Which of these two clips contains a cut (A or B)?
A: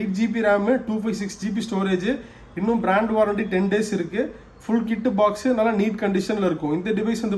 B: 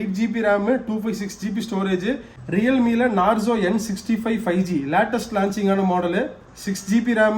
B